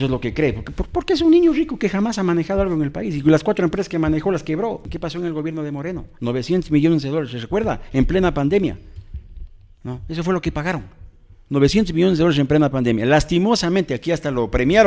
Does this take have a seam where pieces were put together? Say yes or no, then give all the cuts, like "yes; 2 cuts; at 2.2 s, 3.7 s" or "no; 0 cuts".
yes; 1 cut; at 4.9 s